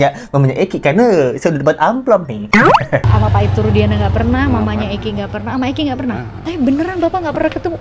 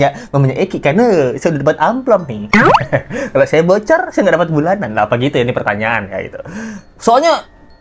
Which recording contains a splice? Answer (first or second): first